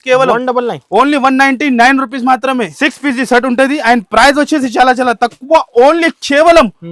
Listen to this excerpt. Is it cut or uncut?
cut